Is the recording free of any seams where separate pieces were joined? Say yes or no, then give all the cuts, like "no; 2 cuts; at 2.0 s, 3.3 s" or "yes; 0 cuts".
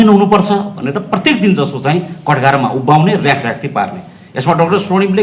yes; 0 cuts